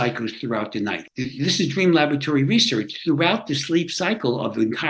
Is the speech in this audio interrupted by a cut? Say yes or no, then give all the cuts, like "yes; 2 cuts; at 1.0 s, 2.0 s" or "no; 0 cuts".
yes; 1 cut; at 1.0 s